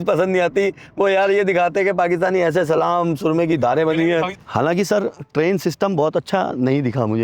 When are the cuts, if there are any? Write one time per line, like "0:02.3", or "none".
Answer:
0:04.3